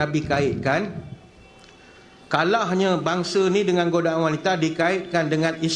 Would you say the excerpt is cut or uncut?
uncut